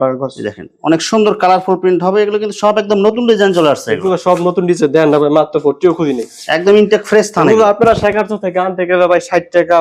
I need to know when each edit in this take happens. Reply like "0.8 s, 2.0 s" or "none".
none